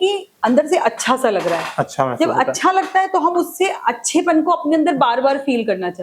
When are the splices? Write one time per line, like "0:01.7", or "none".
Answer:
none